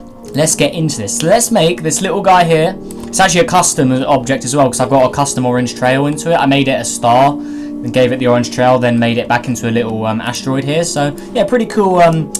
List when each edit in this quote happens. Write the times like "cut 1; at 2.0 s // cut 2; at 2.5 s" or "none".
none